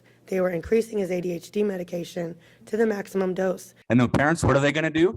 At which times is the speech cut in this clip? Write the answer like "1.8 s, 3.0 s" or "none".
3.7 s